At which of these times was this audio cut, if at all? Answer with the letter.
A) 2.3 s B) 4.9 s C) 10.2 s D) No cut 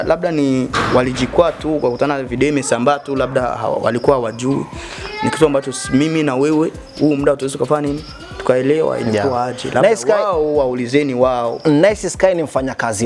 D